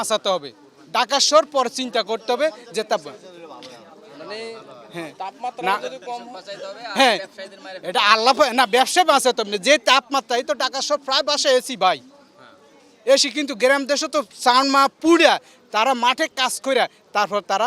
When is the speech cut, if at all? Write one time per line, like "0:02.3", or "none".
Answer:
none